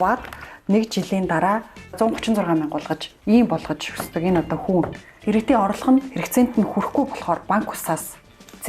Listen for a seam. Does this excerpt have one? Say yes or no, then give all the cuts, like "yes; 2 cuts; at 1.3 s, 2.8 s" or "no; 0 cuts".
yes; 2 cuts; at 1.9 s, 5.1 s